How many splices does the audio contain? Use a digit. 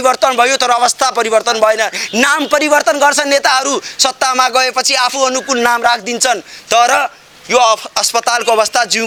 0